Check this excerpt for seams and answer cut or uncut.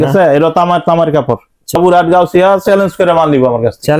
cut